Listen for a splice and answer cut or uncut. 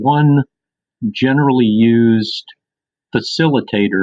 uncut